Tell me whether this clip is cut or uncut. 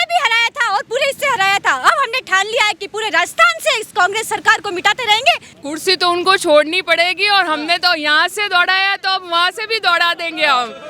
cut